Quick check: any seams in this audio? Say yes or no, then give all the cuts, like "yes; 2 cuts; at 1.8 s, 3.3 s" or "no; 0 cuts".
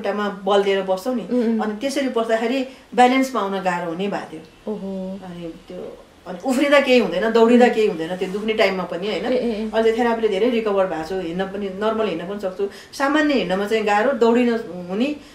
no; 0 cuts